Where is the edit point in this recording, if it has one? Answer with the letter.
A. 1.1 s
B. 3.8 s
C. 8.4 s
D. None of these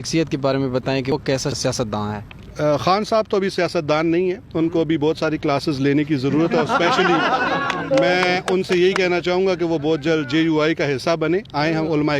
A